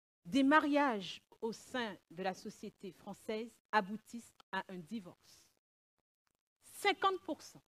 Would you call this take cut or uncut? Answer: cut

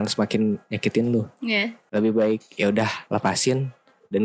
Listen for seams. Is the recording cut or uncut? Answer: cut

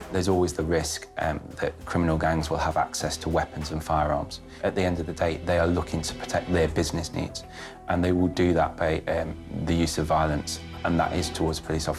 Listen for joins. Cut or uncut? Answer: uncut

